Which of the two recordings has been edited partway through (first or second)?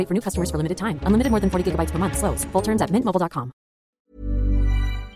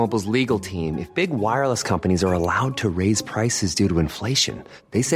first